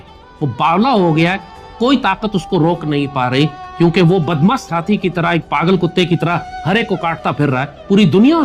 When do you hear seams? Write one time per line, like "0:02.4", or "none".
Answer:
none